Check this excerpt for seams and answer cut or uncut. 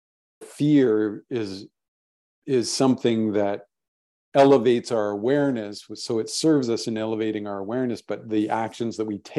uncut